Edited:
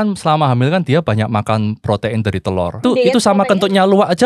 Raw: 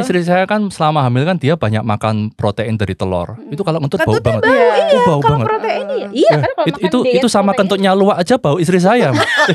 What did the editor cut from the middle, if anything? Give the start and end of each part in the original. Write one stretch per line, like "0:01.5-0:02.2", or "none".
0:03.4-0:06.9